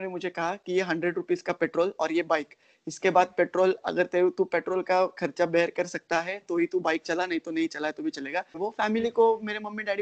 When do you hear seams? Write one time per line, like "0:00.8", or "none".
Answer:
0:08.5